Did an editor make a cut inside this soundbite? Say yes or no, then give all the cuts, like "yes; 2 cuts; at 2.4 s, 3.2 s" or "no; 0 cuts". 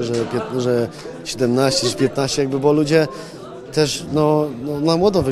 no; 0 cuts